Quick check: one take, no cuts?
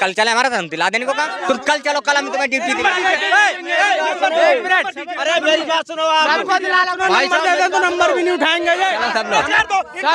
no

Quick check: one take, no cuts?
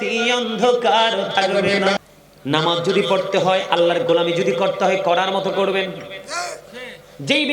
no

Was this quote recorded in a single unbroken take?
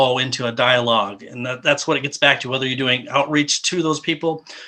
yes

